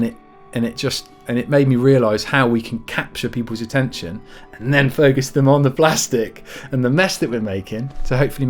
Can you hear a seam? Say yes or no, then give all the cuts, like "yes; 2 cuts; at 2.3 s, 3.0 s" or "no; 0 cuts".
no; 0 cuts